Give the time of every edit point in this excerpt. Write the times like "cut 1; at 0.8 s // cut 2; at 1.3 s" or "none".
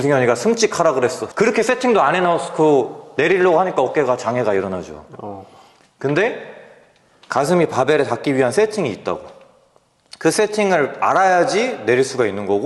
cut 1; at 1.2 s